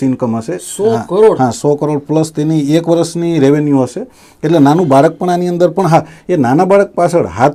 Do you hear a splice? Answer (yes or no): no